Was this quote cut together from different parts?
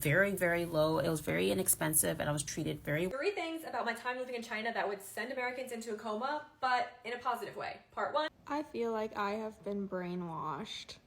yes; 2 cuts; at 3.1 s, 8.4 s

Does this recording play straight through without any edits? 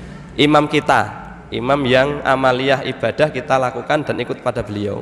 yes; 0 cuts

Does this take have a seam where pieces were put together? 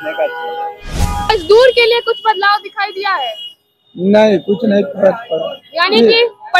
yes; 1 cut; at 1.3 s

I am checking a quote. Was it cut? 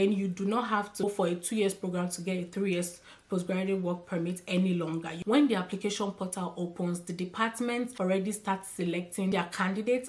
yes; 2 cuts; at 1.0 s, 5.2 s

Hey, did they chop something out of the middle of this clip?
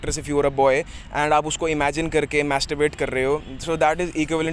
no; 0 cuts

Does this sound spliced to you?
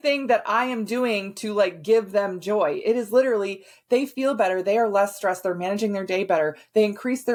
no; 0 cuts

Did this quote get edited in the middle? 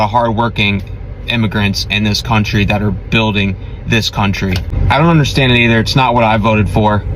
yes; 1 cut; at 4.7 s

